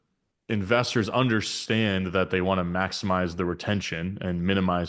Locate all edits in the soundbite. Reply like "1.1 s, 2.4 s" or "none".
none